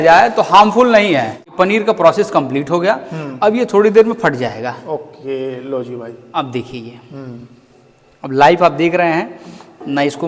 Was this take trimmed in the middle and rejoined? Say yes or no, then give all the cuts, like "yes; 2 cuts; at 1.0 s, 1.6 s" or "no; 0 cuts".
yes; 1 cut; at 1.5 s